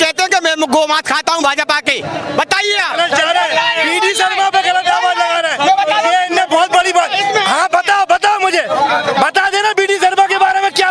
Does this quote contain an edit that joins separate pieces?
no; 0 cuts

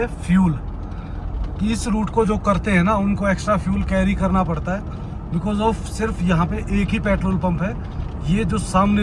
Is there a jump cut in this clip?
no; 0 cuts

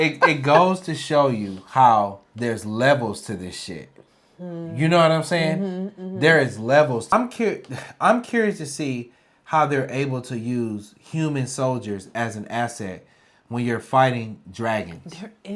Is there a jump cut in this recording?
yes; 1 cut; at 7.1 s

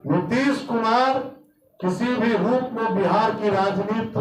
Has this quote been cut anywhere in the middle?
no; 0 cuts

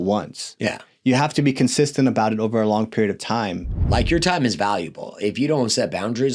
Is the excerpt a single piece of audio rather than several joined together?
no; 1 cut; at 3.9 s

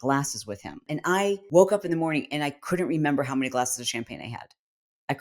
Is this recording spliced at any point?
yes; 1 cut; at 1.0 s

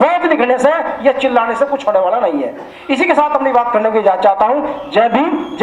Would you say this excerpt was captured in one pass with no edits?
yes; 0 cuts

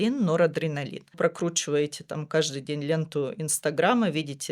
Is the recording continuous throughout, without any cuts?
no; 1 cut; at 1.0 s

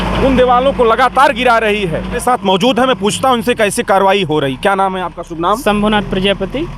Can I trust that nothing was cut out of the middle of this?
no; 1 cut; at 2.2 s

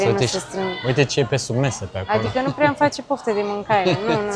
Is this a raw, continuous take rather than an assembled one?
yes; 0 cuts

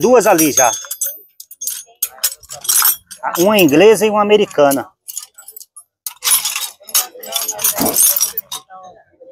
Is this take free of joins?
yes; 0 cuts

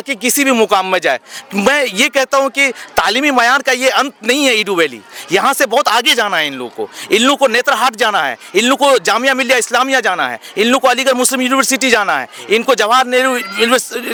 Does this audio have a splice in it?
no; 0 cuts

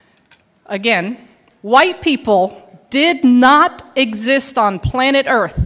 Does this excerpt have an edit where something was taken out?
no; 0 cuts

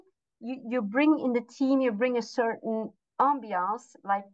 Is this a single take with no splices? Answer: yes; 0 cuts

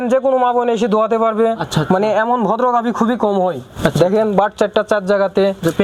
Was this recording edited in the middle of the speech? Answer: no; 0 cuts

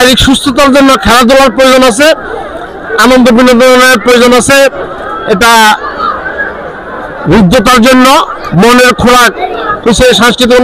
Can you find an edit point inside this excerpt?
no; 0 cuts

